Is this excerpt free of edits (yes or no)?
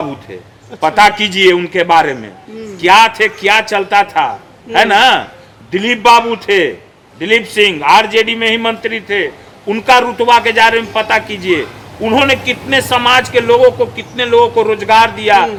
yes